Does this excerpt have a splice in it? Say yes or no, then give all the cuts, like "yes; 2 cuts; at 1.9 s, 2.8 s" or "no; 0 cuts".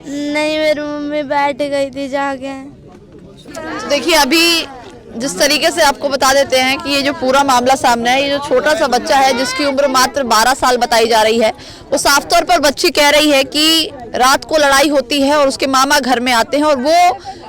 no; 0 cuts